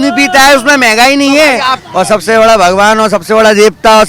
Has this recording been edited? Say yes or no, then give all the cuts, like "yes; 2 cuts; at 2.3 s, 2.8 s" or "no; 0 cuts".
yes; 1 cut; at 1.8 s